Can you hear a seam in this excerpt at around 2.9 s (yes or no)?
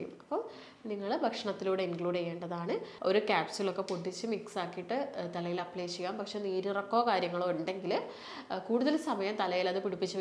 yes